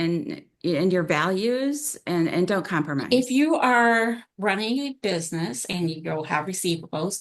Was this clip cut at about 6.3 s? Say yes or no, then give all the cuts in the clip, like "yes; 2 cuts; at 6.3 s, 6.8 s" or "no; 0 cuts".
no; 1 cut; at 3.0 s